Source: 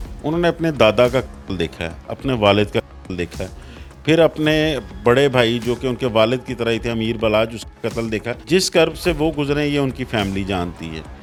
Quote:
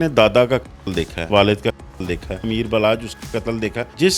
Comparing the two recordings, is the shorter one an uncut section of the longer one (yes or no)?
no